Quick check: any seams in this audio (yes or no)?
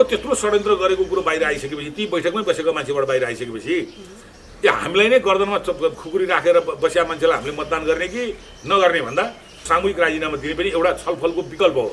yes